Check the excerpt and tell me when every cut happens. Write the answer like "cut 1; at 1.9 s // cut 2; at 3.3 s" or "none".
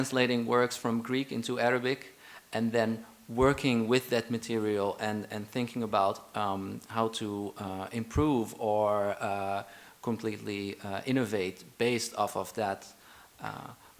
none